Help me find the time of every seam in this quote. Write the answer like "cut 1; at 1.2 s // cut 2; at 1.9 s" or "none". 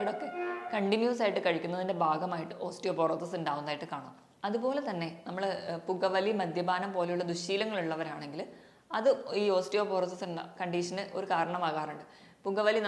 none